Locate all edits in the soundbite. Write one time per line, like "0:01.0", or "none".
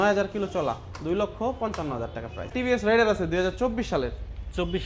0:02.5